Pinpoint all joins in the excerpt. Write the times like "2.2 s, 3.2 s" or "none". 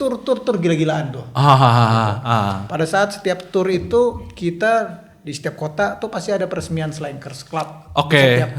none